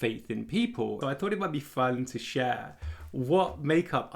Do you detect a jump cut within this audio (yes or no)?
yes